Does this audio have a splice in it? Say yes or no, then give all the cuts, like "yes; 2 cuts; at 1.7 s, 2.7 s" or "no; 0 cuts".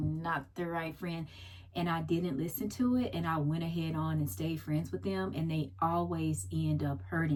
no; 0 cuts